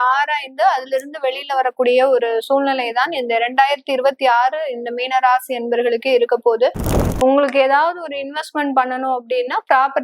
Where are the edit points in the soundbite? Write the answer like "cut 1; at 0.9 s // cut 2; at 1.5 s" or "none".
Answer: cut 1; at 7.0 s